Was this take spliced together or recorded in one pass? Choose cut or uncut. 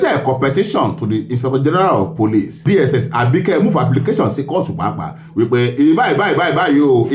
cut